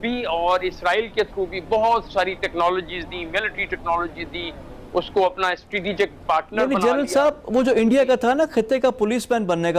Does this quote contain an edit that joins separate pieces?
no; 0 cuts

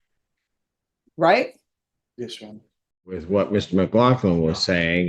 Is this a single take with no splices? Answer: no; 1 cut; at 3.1 s

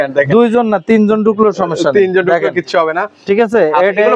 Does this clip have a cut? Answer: no; 0 cuts

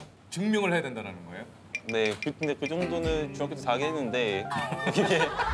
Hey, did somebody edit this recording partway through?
no; 0 cuts

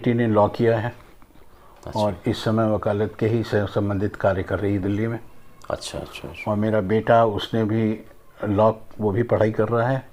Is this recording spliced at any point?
no; 0 cuts

